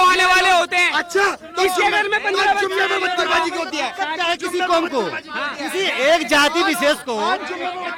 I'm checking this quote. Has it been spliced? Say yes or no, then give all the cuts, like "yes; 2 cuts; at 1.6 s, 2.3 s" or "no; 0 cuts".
no; 0 cuts